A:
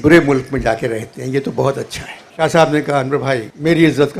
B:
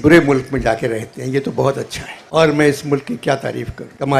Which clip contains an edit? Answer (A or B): A